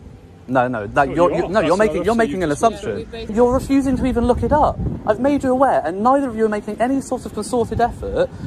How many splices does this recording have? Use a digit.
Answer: 1